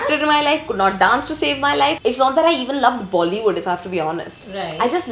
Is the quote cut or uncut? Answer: cut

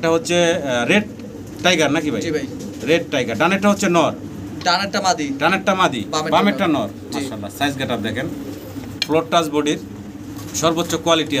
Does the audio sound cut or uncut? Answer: uncut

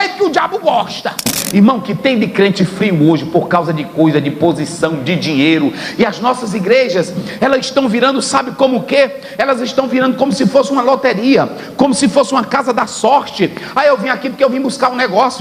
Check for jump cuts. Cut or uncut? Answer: cut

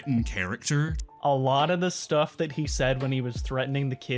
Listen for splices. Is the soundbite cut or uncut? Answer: cut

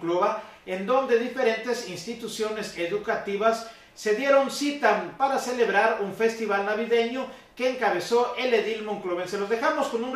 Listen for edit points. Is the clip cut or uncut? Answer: cut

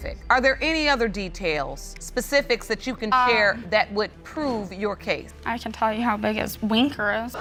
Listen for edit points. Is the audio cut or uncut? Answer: uncut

